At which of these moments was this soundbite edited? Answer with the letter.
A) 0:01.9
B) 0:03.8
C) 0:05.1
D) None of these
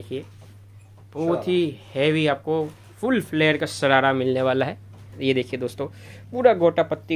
C